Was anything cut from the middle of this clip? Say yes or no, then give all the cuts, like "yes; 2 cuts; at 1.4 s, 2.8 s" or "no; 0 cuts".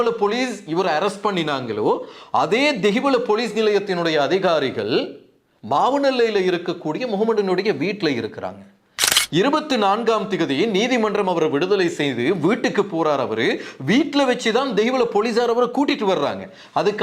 yes; 1 cut; at 9.1 s